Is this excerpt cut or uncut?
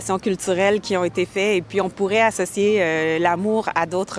uncut